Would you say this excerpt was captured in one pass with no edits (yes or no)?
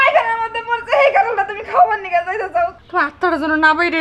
no